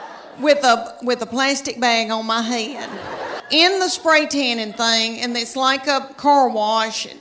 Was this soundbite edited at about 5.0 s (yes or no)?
no